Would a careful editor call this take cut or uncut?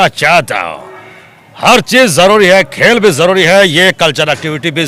uncut